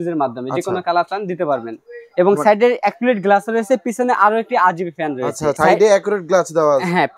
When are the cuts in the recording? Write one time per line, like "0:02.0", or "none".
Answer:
none